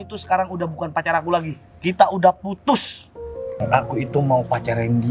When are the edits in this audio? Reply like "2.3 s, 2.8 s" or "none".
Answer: 3.4 s